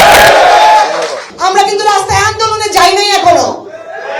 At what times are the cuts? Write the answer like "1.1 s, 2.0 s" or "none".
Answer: 1.3 s